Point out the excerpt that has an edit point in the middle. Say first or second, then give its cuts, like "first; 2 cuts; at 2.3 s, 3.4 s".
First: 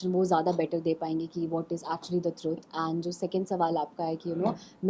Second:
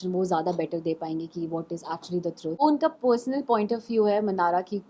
second; 1 cut; at 2.6 s